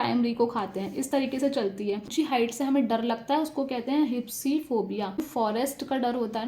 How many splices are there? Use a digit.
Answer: 2